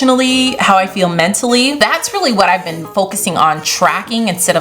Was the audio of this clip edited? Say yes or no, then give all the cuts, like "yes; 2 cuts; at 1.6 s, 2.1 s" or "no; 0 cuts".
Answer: yes; 1 cut; at 1.8 s